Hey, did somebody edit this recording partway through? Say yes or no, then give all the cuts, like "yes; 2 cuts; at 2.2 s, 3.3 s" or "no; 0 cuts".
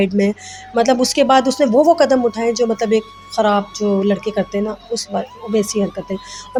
no; 0 cuts